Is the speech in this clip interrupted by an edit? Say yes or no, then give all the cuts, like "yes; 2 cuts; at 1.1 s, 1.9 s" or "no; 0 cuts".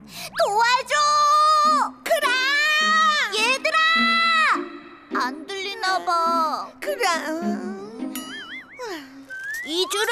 no; 0 cuts